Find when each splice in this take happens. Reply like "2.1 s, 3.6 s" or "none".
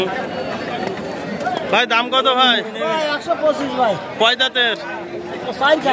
none